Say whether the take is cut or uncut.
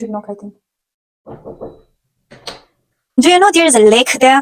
cut